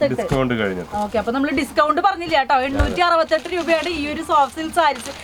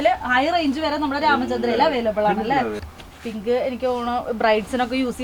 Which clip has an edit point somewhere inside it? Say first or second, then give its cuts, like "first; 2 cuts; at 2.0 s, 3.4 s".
second; 1 cut; at 2.8 s